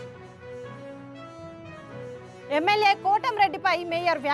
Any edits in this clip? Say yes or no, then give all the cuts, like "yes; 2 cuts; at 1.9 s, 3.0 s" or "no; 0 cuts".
no; 0 cuts